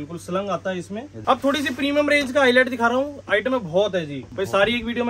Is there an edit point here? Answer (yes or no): yes